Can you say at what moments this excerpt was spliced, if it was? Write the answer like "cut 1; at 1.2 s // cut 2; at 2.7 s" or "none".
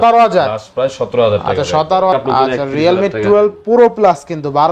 cut 1; at 2.1 s